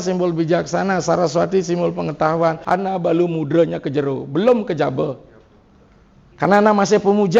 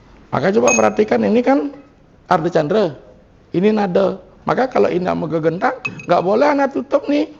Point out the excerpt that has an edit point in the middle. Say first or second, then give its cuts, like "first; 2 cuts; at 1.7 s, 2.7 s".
first; 1 cut; at 2.6 s